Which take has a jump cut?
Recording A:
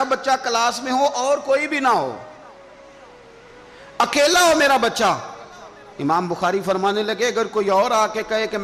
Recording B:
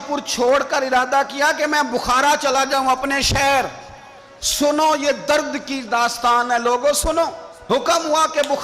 B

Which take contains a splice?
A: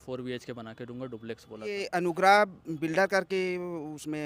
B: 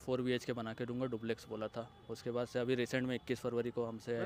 A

